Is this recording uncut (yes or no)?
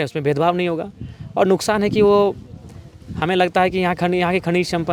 yes